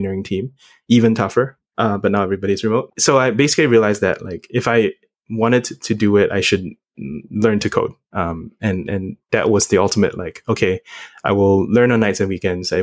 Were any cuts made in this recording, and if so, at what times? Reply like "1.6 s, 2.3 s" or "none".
2.9 s